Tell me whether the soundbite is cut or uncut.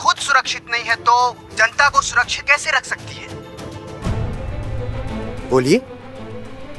cut